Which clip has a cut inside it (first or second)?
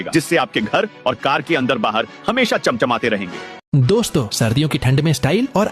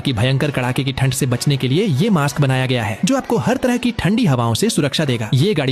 first